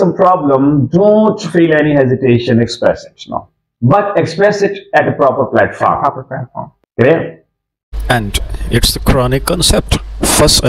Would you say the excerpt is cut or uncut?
uncut